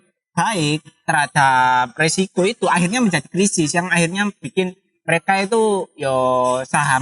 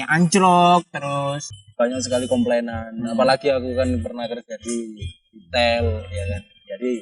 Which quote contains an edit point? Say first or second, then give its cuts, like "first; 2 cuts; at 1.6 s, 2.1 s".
second; 1 cut; at 1.4 s